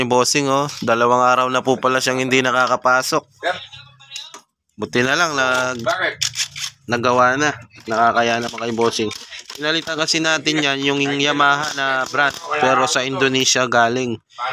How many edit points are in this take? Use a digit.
0